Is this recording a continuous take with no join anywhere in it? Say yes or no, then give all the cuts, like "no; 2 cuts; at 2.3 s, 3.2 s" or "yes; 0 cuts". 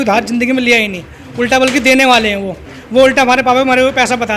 yes; 0 cuts